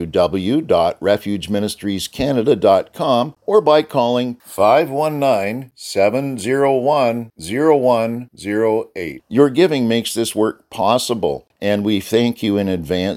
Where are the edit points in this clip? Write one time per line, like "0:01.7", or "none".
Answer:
0:03.4
0:11.5